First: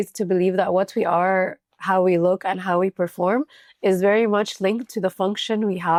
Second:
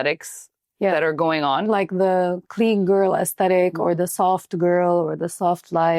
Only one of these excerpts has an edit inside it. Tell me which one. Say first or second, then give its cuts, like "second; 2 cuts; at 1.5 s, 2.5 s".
second; 1 cut; at 1.8 s